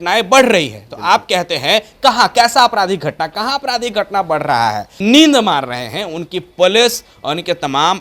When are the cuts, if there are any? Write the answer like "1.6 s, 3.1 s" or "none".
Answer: 4.9 s